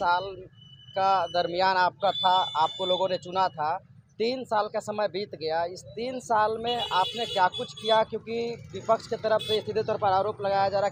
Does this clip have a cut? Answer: no; 0 cuts

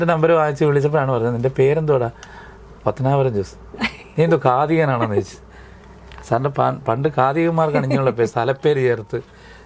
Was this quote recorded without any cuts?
yes; 0 cuts

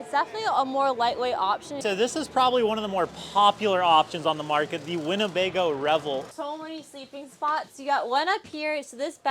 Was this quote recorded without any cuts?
no; 2 cuts; at 1.7 s, 6.3 s

